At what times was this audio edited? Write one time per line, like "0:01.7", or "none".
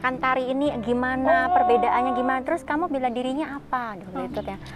none

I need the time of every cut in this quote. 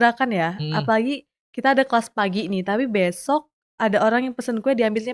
none

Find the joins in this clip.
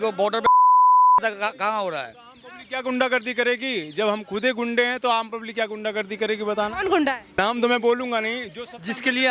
0:07.4

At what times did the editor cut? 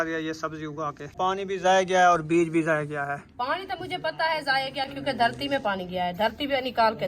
0:01.1

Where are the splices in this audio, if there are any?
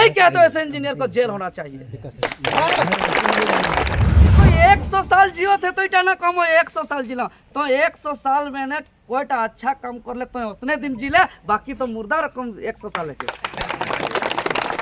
0:04.3

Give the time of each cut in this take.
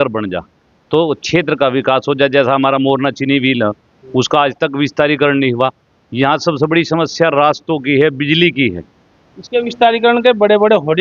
none

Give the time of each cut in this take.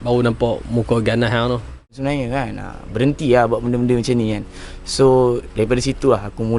0:02.0

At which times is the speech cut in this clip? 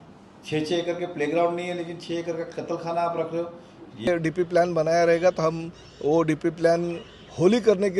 0:04.1

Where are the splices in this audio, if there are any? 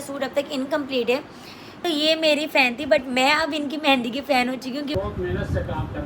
0:01.8
0:04.9

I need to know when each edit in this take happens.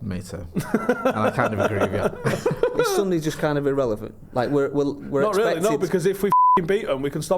0:02.3

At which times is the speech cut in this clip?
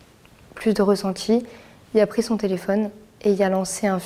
none

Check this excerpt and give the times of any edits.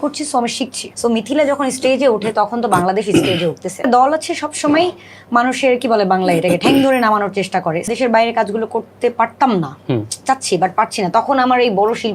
0:00.9
0:03.8
0:07.9

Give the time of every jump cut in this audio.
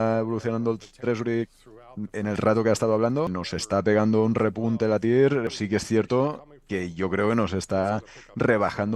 0:03.3
0:05.5

